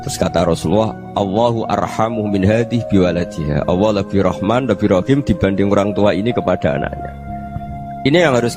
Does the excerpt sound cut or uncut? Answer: uncut